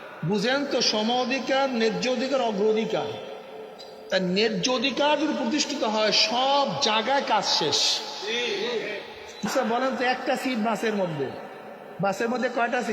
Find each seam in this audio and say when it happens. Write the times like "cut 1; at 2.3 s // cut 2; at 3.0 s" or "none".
cut 1; at 9.5 s